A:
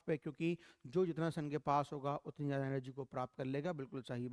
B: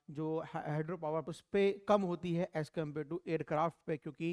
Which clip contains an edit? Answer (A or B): B